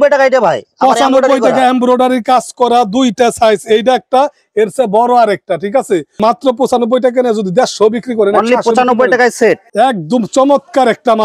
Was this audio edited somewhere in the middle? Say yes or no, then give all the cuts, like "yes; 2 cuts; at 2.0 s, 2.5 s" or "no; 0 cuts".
no; 0 cuts